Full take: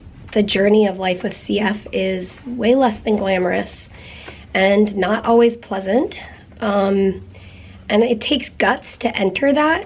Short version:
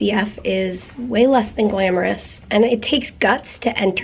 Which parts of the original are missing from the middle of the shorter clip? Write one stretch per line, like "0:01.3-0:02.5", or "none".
0:03.8-0:07.7